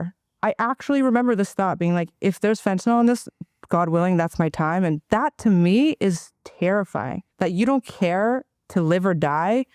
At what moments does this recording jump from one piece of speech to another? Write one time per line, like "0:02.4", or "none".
0:07.2